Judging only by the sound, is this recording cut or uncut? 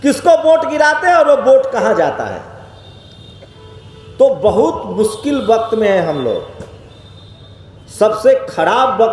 uncut